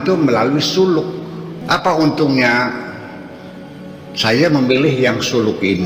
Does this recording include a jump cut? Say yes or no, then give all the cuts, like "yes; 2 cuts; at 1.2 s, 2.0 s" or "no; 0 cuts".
yes; 1 cut; at 1.5 s